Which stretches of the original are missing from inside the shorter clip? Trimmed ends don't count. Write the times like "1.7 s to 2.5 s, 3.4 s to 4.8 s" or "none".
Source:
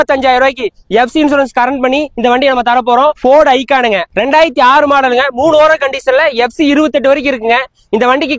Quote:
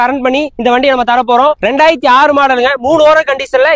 3.2 s to 4.1 s

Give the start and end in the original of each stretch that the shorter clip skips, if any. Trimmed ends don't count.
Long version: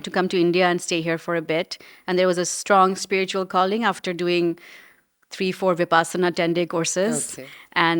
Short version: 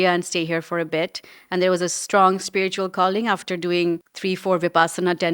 4.7 s to 5.3 s

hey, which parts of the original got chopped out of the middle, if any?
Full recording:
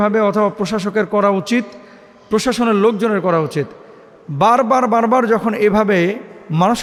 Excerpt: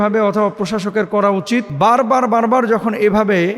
1.7 s to 4.3 s

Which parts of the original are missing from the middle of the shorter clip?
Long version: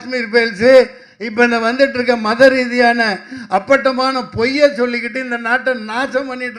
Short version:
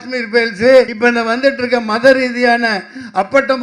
0.9 s to 1.3 s

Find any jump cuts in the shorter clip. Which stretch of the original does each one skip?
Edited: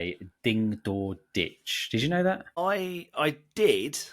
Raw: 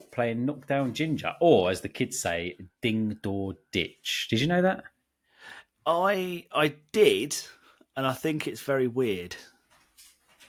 5.0 s to 6.0 s

